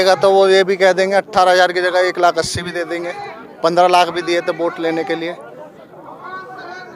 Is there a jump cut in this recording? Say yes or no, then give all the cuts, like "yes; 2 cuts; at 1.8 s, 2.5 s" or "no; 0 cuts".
no; 0 cuts